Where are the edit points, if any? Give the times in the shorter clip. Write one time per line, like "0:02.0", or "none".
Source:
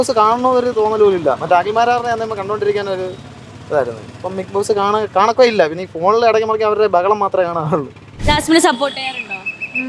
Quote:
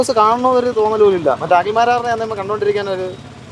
none

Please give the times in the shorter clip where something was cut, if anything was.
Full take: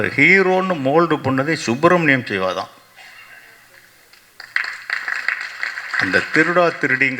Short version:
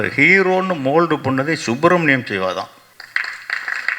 0:02.8

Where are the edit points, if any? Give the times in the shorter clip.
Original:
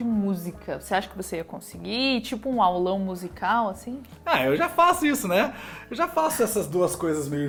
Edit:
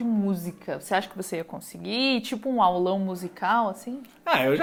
none

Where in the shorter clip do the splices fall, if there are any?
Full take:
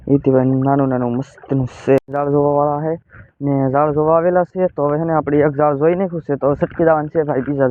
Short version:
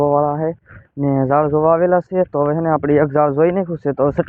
none

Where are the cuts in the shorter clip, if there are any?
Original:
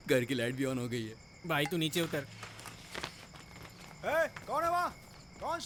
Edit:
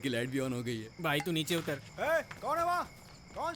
0:00.9
0:01.9

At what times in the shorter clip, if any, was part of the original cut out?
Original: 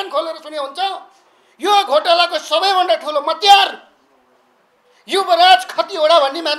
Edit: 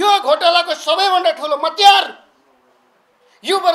none

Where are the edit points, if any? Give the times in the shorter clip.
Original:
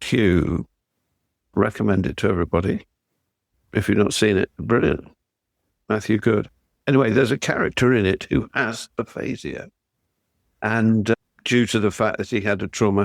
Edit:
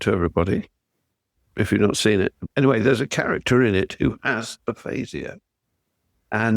0:02.4

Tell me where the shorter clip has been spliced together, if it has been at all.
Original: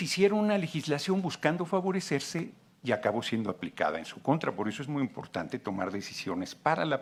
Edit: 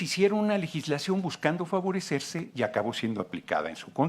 0:02.4

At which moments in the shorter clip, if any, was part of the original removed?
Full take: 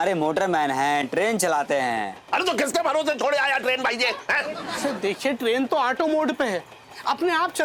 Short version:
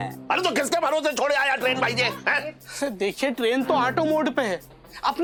none

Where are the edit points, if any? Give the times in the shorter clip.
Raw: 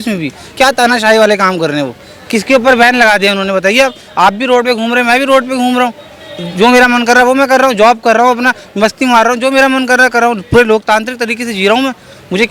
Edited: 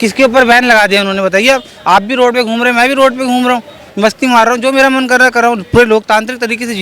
0:03.8

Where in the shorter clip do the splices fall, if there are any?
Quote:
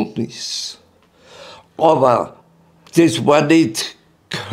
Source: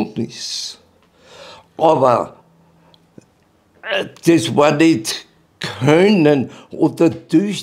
0:02.8

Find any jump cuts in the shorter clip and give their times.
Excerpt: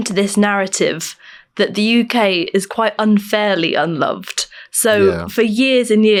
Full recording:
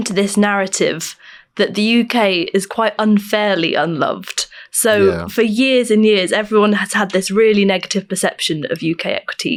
none

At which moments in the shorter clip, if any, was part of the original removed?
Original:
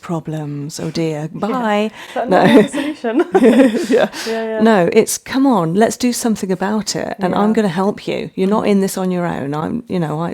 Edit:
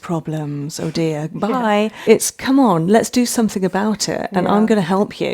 0:02.0

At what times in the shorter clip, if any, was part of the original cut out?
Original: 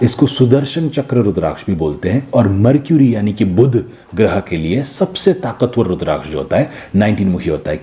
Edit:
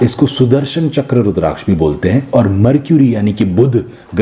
none

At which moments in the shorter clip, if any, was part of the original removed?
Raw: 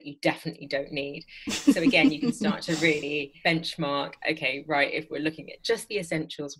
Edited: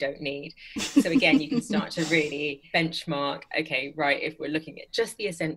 none

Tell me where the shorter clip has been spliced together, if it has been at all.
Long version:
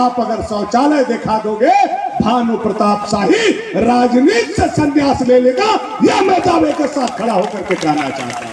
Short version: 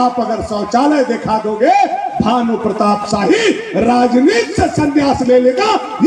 none

